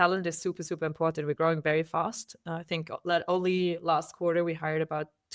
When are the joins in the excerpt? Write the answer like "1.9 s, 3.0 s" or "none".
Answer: none